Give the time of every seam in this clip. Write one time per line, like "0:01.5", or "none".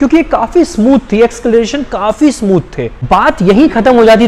0:02.9